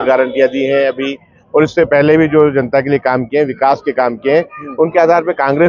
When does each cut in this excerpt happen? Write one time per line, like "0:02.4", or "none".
none

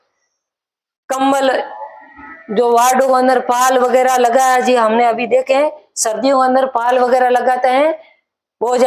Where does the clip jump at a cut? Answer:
none

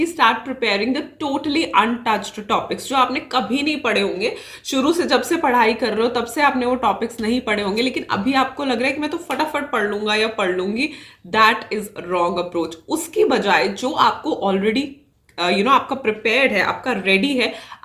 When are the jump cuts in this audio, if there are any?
none

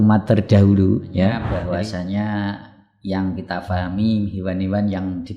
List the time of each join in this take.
0:01.5

